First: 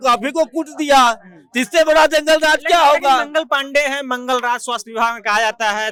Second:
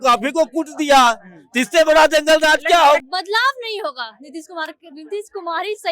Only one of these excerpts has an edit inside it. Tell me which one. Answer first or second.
second